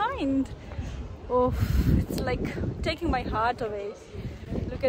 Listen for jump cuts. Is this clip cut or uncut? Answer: uncut